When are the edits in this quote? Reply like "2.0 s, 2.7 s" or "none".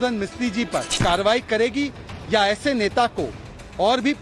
0.9 s